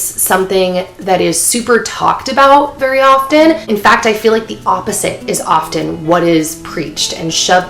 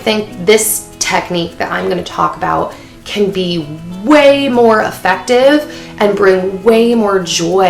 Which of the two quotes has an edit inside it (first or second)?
first